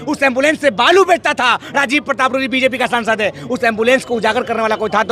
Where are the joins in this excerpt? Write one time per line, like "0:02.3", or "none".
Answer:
none